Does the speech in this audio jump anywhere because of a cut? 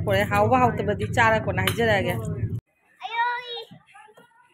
yes; 1 cut; at 2.6 s

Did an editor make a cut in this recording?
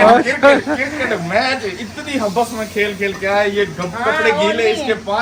no; 0 cuts

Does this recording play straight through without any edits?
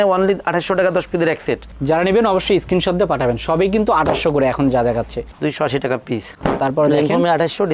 yes; 0 cuts

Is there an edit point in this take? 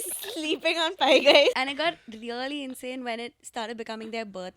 yes; 1 cut; at 1.6 s

